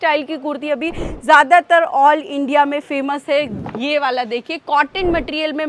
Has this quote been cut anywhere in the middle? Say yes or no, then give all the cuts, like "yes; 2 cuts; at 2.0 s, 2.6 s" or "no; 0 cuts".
yes; 1 cut; at 3.5 s